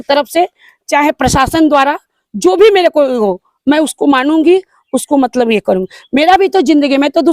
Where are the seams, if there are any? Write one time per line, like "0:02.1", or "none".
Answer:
none